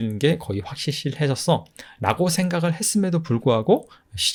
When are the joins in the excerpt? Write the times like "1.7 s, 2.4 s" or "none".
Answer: none